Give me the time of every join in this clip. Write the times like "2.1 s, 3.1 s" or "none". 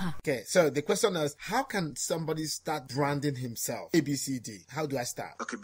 3.9 s